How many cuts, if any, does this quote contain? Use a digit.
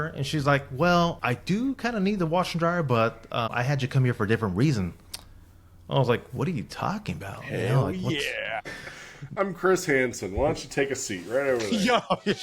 1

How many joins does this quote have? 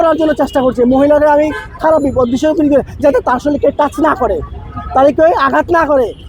0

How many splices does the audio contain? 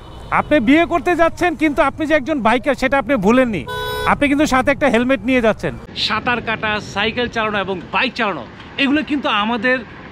1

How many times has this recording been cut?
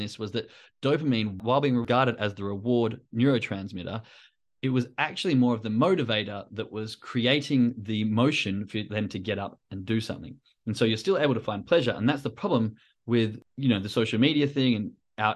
2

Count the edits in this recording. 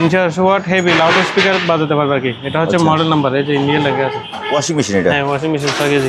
1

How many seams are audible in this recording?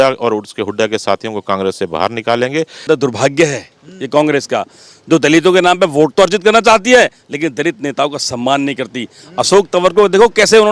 1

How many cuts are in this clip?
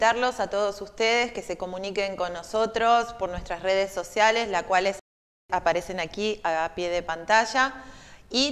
0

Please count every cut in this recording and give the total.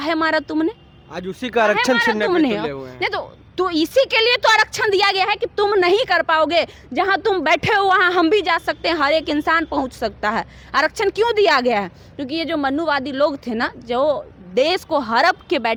0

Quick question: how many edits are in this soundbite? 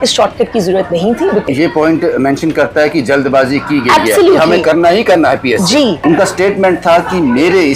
2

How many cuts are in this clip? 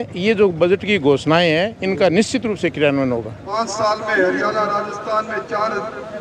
1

